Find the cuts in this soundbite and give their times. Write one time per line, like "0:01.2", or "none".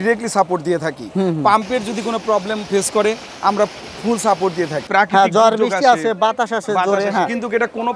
0:04.9